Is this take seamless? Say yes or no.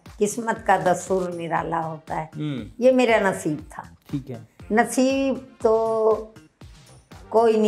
yes